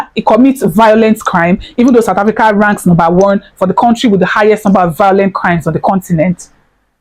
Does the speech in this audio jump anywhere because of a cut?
no; 0 cuts

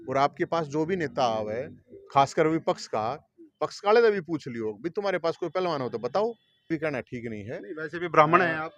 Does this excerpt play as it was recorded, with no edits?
no; 1 cut; at 6.7 s

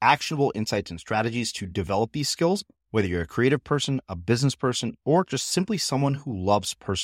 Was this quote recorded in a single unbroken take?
yes; 0 cuts

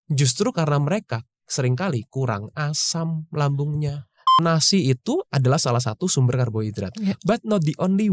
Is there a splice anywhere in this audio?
yes; 1 cut; at 4.4 s

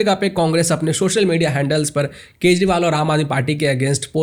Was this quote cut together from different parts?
no; 0 cuts

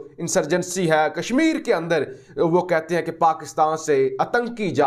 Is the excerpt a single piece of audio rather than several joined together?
yes; 0 cuts

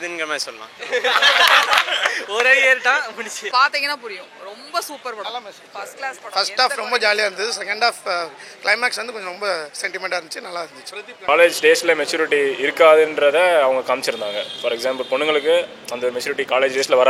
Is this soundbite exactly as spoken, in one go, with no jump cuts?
no; 2 cuts; at 3.4 s, 11.2 s

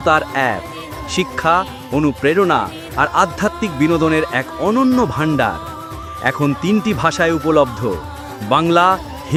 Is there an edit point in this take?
no; 0 cuts

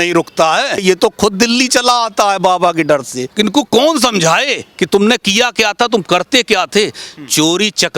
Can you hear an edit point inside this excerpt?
yes; 2 cuts; at 0.8 s, 3.2 s

